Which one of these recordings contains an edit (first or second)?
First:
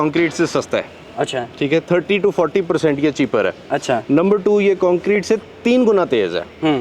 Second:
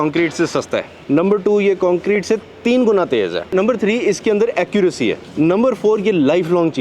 second